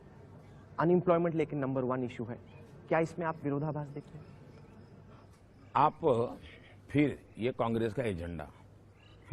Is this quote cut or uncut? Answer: uncut